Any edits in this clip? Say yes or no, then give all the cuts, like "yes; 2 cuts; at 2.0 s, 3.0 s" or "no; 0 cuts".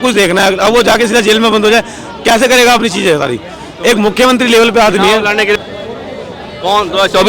yes; 1 cut; at 5.6 s